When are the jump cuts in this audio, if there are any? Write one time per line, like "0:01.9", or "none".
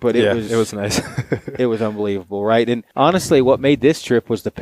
0:02.9